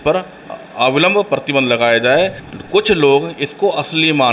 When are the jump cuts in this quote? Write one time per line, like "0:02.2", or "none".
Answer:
0:02.4